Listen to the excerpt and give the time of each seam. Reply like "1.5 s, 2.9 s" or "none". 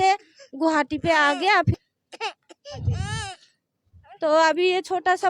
1.8 s